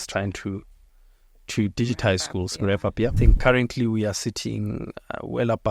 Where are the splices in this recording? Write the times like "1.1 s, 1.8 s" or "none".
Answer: 3.1 s

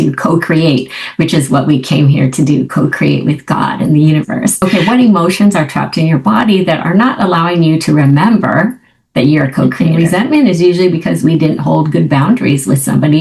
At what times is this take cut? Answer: 4.6 s, 9.8 s

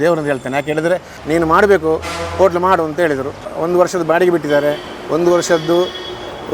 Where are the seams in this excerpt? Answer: 1.1 s, 3.5 s

